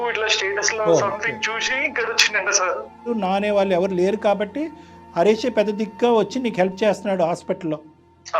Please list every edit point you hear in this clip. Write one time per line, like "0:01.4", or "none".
0:03.1